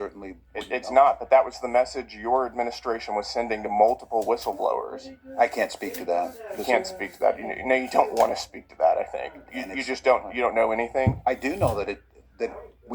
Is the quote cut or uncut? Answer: cut